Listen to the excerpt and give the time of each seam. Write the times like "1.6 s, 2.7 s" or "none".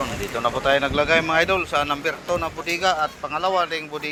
none